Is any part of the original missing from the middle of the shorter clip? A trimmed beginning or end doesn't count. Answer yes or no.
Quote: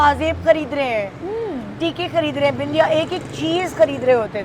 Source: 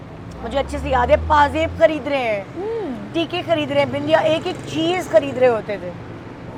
no